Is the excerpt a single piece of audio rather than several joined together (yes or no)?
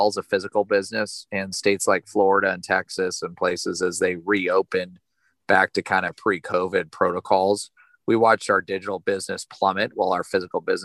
yes